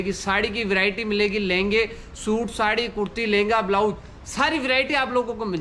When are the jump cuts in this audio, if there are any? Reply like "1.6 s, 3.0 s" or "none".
none